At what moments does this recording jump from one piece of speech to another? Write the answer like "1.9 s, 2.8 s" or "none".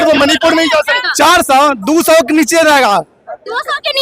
1.0 s